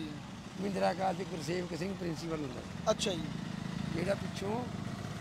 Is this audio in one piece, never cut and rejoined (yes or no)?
yes